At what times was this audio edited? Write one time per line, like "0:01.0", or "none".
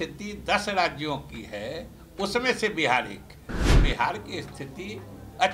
0:03.8